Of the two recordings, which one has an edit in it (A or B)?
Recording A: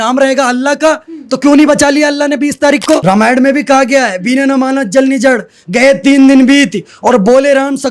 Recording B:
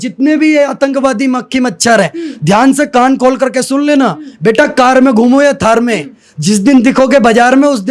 A